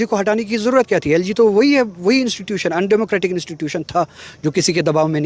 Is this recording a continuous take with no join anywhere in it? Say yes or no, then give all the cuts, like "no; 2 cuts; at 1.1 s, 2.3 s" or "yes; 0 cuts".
yes; 0 cuts